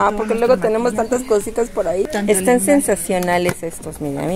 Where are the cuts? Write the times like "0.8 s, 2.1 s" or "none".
2.1 s